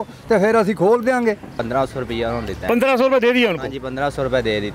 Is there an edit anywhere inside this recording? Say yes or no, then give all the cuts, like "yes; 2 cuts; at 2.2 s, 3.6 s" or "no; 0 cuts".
yes; 1 cut; at 1.5 s